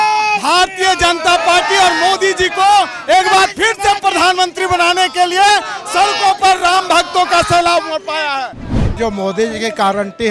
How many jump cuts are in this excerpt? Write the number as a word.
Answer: one